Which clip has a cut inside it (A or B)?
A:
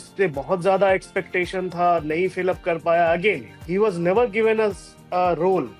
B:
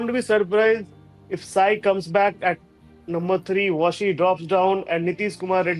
A